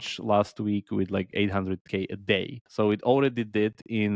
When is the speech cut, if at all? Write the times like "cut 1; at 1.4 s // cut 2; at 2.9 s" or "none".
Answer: cut 1; at 2.6 s